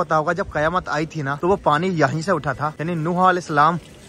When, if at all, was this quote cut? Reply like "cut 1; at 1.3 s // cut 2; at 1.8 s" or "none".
cut 1; at 1.3 s // cut 2; at 2.7 s